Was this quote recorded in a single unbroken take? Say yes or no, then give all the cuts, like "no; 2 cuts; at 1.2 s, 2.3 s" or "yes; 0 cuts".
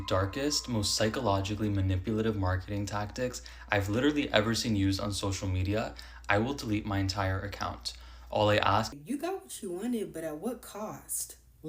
no; 1 cut; at 8.9 s